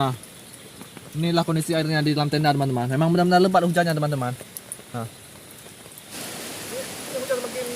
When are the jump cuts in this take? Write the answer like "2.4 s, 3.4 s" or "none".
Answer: 6.1 s